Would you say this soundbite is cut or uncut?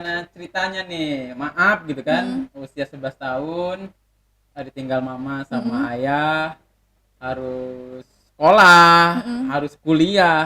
uncut